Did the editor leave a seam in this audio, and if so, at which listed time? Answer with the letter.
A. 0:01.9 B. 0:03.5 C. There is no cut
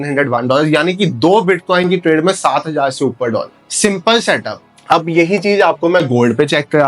C